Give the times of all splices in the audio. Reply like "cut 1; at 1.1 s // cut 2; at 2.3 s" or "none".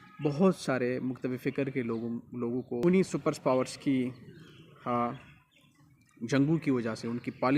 cut 1; at 2.8 s